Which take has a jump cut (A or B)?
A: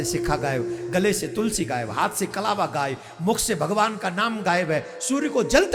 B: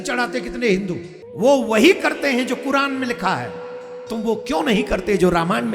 B